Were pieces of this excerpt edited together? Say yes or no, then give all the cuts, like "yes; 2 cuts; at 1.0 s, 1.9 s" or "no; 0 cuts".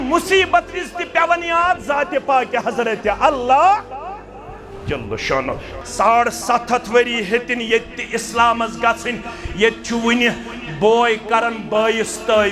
yes; 1 cut; at 5.7 s